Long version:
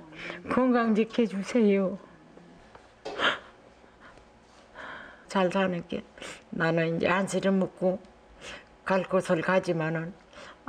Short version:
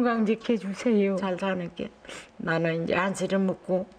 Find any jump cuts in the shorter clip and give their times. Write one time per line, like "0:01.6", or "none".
0:01.2